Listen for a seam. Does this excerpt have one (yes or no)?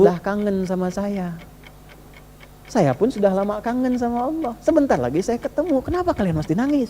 no